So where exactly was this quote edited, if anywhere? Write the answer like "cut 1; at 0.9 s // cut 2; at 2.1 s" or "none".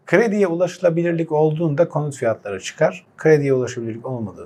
none